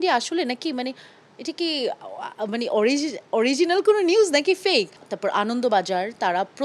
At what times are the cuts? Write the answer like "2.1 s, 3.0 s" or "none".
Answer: 5.0 s